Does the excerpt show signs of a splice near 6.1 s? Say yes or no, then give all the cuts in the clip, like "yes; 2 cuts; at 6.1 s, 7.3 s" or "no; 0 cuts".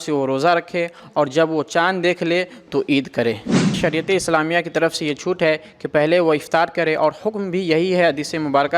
no; 1 cut; at 3.7 s